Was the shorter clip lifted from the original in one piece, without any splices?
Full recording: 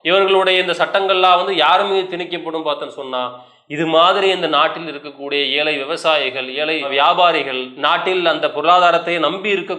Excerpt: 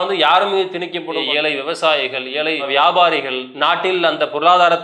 no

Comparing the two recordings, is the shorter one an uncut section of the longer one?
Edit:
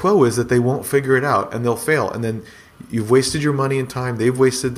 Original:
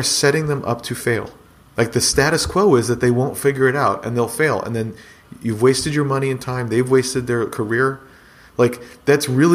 yes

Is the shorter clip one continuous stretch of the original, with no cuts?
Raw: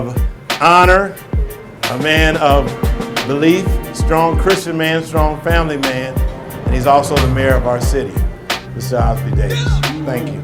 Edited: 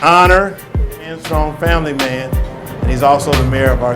no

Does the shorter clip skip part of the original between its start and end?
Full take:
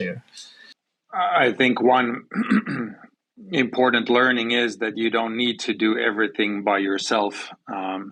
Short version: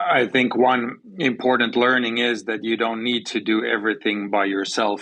yes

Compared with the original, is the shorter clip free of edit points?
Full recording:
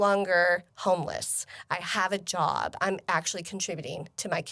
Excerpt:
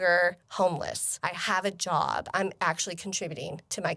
no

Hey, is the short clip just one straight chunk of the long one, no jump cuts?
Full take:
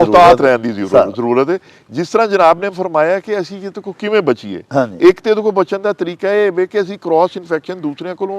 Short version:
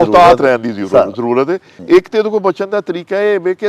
no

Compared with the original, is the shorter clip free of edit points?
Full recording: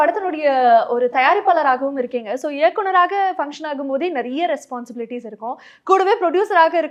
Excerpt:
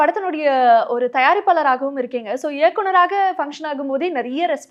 yes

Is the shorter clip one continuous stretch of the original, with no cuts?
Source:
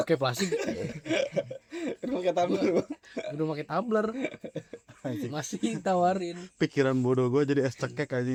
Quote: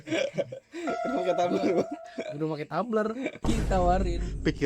no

